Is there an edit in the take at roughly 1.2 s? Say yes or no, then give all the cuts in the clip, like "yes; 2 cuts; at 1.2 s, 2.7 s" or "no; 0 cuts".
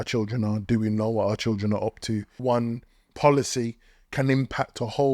no; 1 cut; at 2.4 s